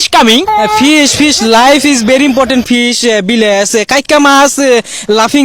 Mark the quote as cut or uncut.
uncut